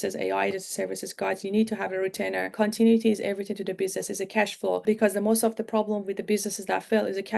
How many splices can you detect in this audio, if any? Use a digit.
2